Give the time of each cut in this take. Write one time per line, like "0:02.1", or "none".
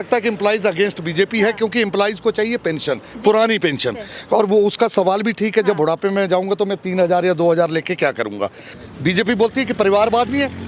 0:08.8